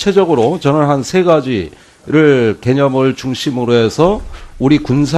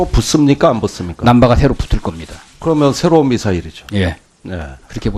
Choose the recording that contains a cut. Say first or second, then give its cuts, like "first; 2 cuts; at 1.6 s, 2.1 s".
first; 1 cut; at 2.2 s